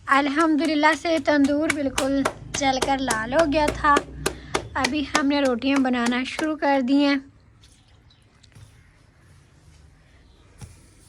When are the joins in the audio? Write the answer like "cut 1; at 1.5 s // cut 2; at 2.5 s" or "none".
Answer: none